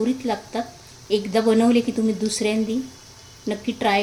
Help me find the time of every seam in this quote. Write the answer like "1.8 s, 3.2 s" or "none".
none